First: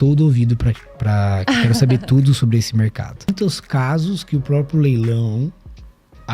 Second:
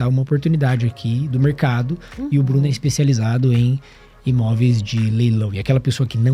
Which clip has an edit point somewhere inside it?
first; 1 cut; at 3.3 s

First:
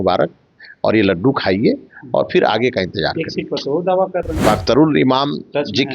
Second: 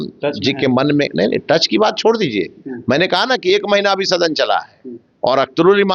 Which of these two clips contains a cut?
first; 1 cut; at 4.3 s

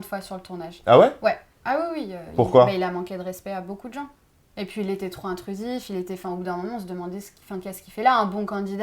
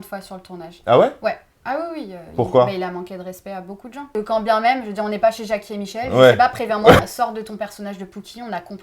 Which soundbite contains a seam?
second; 2 cuts; at 4.1 s, 7.0 s

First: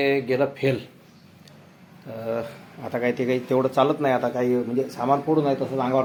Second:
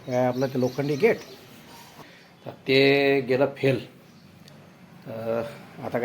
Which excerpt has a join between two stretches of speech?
second; 1 cut; at 1.9 s

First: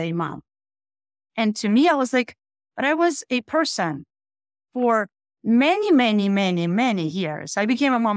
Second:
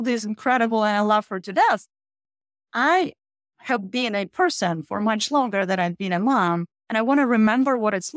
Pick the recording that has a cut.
second; 1 cut; at 6.7 s

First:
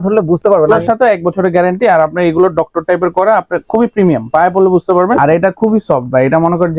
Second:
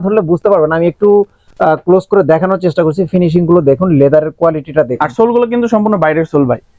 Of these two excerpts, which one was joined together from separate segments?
first; 2 cuts; at 0.7 s, 5.2 s

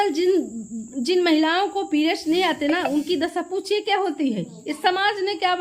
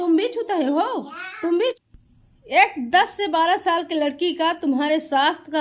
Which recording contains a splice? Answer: second; 1 cut; at 1.8 s

